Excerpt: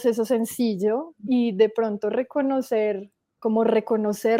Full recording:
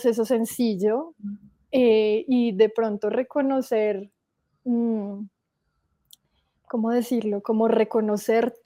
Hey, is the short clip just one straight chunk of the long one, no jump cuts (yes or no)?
no